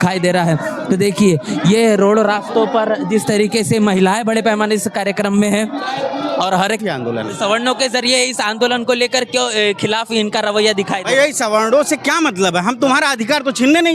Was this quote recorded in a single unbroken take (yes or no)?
no